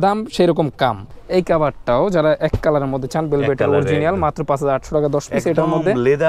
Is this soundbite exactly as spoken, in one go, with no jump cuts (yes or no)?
no